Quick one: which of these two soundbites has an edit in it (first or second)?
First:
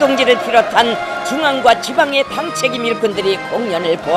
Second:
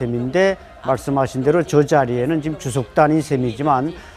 first